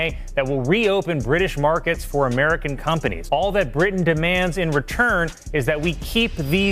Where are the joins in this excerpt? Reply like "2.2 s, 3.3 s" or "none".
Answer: none